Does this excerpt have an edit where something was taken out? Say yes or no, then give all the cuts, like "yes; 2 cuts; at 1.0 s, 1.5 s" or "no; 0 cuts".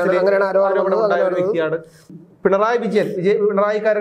yes; 1 cut; at 2.0 s